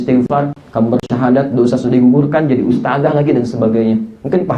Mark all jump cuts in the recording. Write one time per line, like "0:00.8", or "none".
none